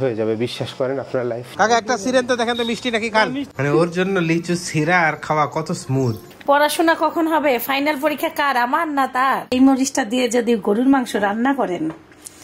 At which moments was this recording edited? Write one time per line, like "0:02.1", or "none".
0:01.5
0:03.5
0:06.3
0:09.5